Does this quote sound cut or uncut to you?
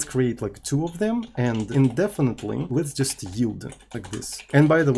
cut